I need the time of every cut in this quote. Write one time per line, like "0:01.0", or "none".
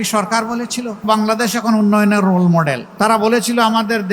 0:01.1
0:02.8